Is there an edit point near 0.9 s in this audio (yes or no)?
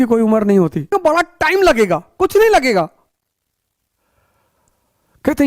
yes